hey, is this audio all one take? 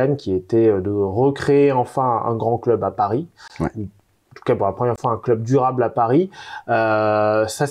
yes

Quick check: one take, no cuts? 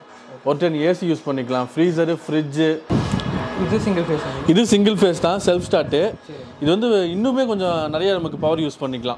no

